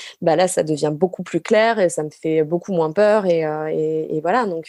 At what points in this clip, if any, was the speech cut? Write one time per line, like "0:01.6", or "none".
none